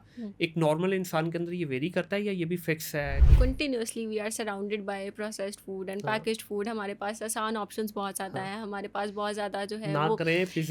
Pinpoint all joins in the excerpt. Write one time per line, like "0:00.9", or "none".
0:03.2